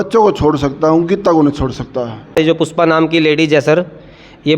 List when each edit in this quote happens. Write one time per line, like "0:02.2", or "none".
0:02.3